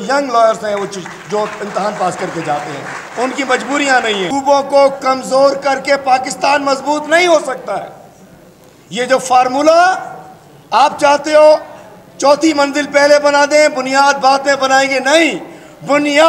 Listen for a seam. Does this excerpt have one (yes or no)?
yes